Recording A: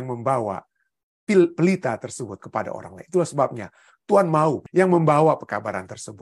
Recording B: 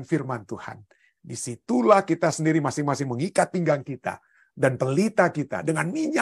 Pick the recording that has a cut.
A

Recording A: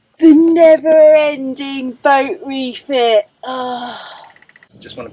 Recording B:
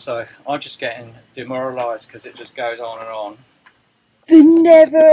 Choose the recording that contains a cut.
A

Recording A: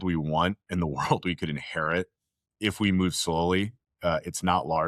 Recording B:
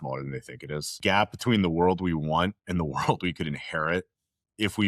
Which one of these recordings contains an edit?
B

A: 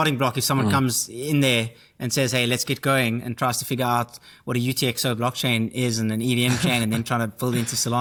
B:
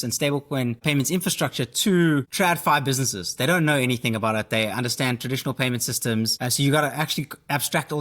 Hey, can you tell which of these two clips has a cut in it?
B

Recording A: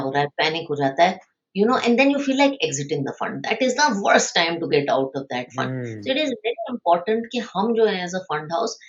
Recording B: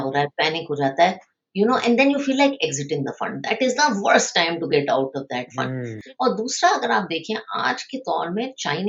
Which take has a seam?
B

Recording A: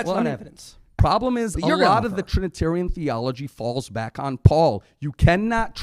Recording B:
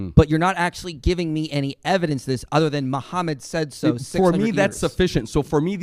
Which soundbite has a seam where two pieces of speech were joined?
A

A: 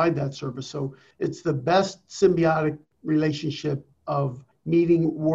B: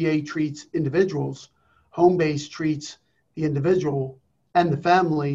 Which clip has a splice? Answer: A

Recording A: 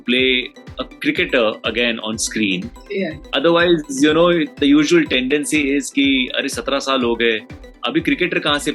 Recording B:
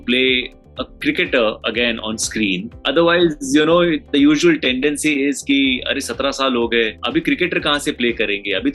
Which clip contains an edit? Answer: B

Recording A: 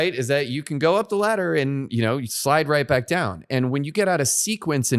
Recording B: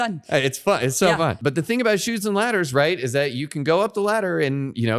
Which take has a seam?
B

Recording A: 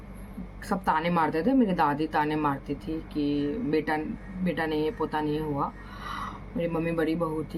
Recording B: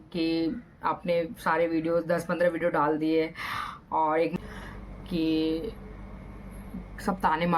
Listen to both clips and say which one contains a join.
B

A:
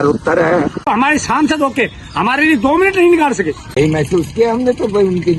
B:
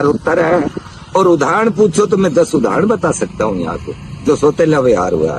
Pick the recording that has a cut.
A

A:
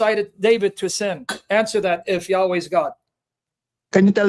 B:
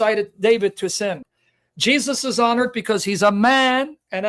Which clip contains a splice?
B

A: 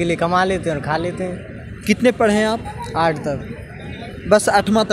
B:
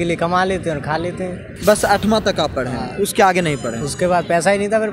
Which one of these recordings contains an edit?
B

